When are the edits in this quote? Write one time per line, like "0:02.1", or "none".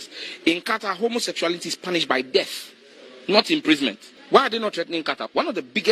0:04.1